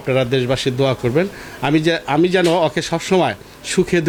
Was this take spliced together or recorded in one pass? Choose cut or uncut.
uncut